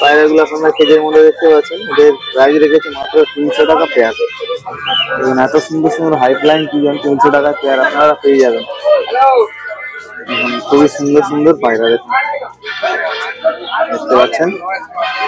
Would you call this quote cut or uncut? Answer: uncut